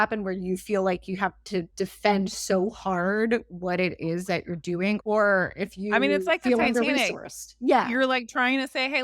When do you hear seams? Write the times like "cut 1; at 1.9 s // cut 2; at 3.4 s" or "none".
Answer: cut 1; at 1.7 s // cut 2; at 5.0 s